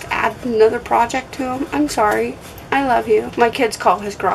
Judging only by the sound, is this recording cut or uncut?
cut